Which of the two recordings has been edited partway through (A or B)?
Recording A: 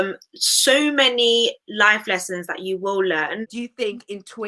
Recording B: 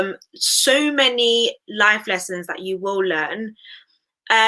A